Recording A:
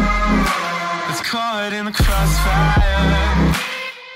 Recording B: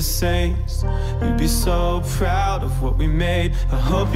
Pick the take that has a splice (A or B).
A